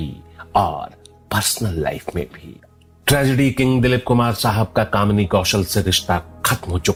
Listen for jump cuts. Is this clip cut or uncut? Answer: uncut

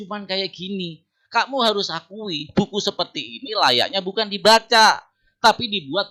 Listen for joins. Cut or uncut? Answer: uncut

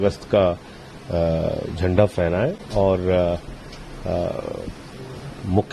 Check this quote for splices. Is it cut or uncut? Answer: uncut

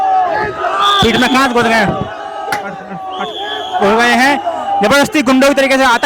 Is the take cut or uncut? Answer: uncut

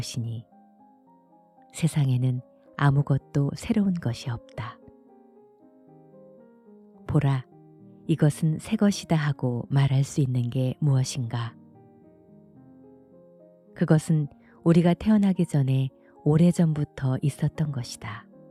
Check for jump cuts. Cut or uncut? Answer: uncut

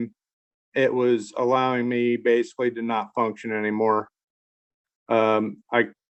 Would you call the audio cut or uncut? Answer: uncut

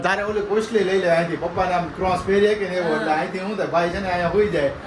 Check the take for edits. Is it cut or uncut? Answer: uncut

